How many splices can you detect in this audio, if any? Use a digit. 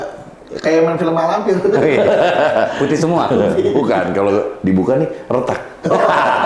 0